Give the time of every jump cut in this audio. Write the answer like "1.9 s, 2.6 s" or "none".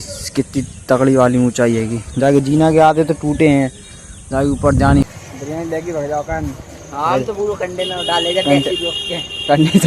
5.1 s

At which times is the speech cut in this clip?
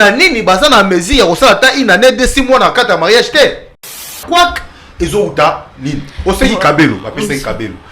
4.2 s

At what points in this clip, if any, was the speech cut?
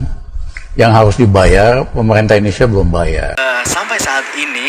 3.4 s

